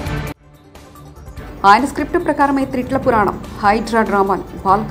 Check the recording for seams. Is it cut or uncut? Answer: uncut